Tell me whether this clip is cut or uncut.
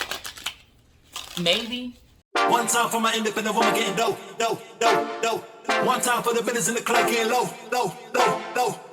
cut